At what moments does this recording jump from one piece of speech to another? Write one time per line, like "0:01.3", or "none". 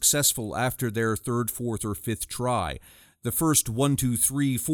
none